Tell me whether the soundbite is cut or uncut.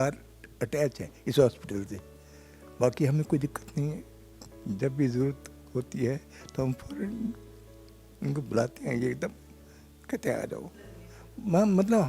uncut